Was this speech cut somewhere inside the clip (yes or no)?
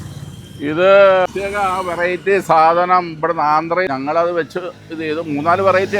yes